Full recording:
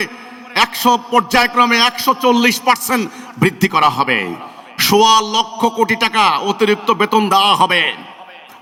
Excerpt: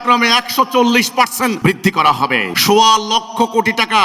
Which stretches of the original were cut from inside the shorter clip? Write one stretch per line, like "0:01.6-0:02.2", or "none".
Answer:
0:03.1-0:03.3
0:04.3-0:04.7